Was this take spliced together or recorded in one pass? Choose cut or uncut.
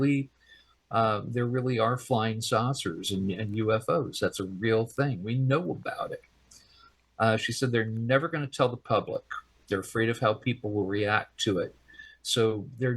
uncut